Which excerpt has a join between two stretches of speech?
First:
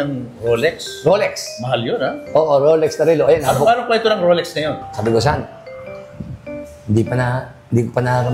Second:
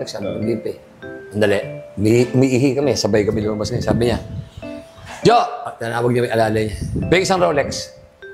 first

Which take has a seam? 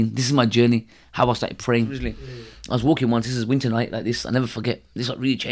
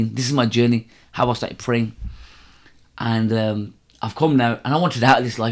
first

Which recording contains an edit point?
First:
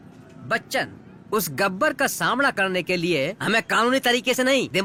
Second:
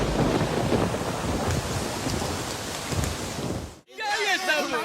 second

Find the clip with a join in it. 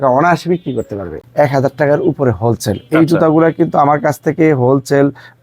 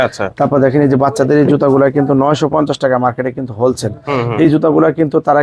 first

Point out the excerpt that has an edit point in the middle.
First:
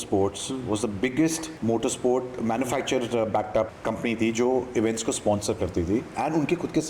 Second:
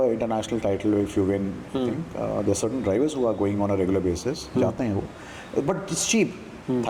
first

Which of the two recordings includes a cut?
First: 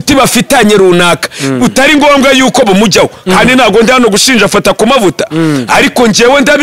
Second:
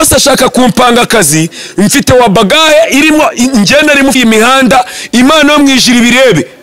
second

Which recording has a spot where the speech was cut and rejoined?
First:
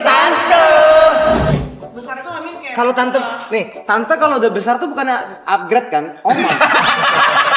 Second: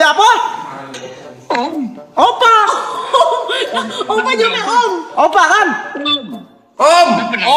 first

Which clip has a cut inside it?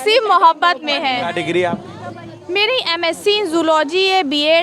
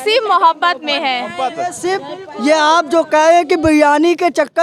first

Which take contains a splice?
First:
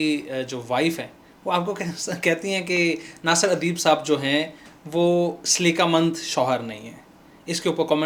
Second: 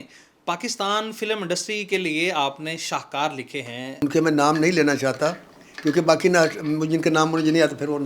second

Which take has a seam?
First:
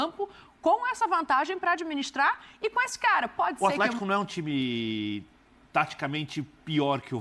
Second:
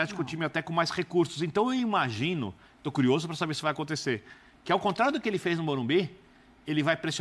first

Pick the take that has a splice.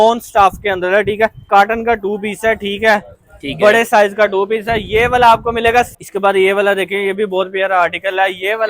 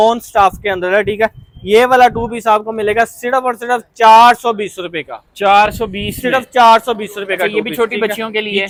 first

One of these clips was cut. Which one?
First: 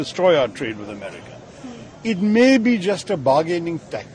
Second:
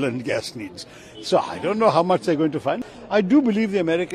second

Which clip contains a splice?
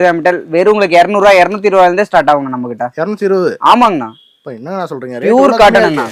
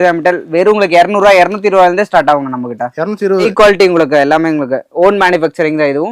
second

